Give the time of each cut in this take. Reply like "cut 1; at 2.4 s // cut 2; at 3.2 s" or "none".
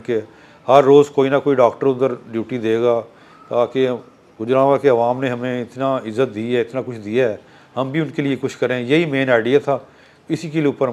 none